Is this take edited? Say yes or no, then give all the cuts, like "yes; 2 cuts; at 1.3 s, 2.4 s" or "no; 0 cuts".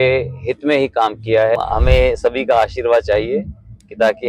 yes; 1 cut; at 1.6 s